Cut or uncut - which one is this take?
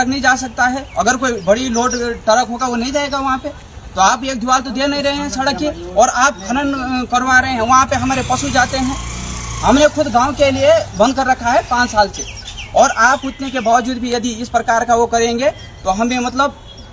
uncut